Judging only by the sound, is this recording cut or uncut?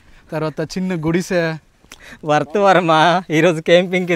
uncut